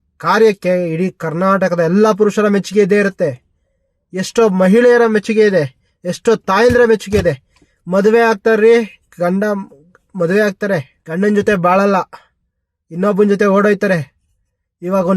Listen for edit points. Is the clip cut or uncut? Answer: cut